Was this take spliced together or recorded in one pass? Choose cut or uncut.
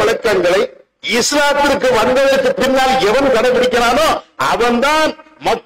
uncut